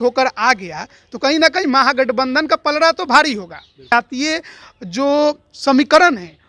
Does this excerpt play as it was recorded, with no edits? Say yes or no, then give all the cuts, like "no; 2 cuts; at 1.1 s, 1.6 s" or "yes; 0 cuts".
no; 1 cut; at 3.9 s